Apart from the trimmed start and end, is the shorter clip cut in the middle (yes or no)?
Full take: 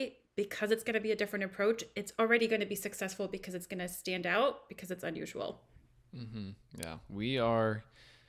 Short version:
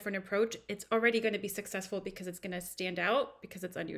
no